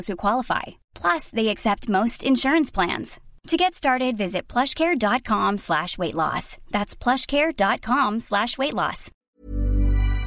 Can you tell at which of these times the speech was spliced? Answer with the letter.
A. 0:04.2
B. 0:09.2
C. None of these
B